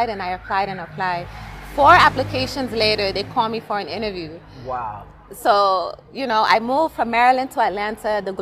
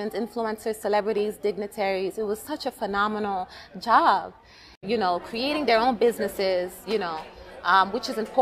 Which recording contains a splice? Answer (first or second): second